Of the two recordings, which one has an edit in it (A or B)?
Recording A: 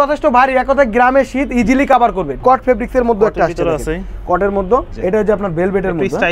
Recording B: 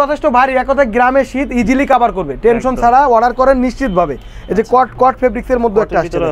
A